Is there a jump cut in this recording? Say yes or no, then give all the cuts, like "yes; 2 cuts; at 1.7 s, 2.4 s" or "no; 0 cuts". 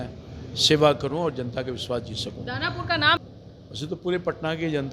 yes; 1 cut; at 3.2 s